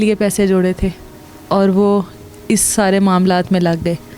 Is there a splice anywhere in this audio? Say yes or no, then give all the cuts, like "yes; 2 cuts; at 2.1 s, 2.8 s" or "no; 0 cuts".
no; 0 cuts